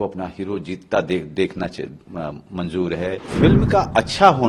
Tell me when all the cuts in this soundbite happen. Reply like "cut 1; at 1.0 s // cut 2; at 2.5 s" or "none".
cut 1; at 3.3 s